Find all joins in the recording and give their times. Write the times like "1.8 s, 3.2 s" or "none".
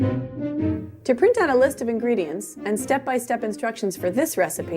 1.0 s